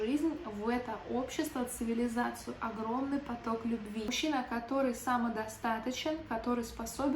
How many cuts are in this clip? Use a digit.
1